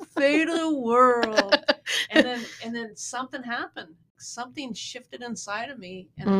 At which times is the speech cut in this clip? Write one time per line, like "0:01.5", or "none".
0:04.1